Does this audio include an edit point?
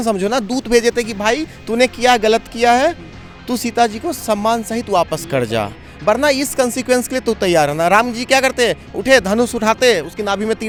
no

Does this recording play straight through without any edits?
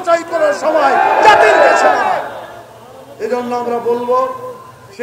yes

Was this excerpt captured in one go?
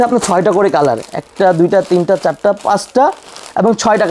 yes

